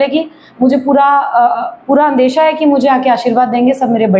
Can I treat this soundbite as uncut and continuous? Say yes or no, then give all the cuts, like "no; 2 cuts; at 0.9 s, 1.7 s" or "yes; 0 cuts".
yes; 0 cuts